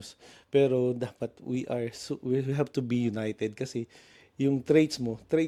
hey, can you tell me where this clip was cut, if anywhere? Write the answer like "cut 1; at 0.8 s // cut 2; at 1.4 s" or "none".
none